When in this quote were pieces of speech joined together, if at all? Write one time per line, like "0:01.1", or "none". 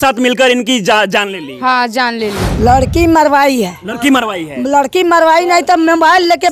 0:02.4